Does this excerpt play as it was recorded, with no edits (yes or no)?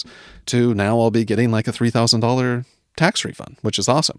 yes